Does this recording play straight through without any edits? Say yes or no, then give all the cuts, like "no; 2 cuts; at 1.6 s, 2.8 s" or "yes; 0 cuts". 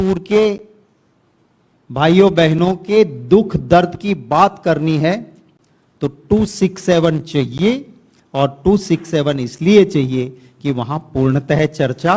yes; 0 cuts